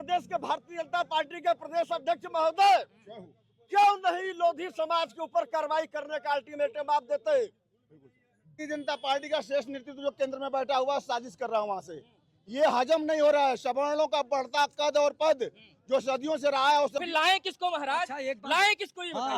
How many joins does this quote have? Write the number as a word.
two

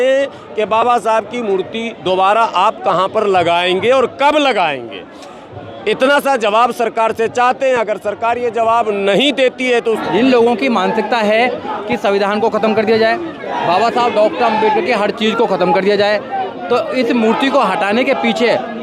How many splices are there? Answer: one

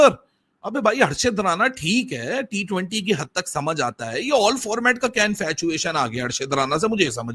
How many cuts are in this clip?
zero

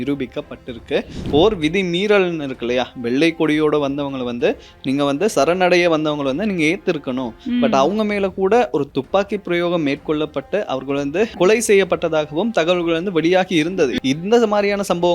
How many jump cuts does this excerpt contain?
three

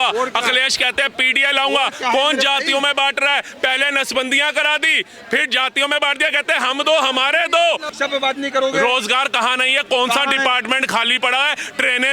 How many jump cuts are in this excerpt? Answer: one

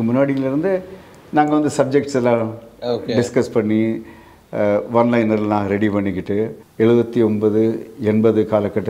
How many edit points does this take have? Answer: one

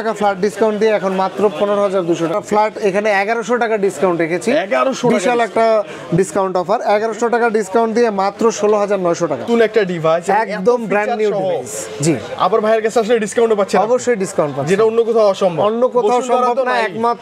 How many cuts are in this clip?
two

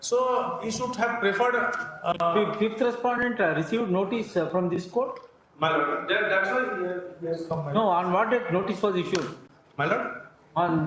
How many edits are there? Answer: zero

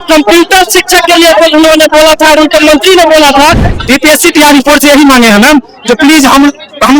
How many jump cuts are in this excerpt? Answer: one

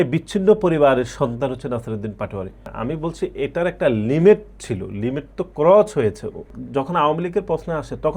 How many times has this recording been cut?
two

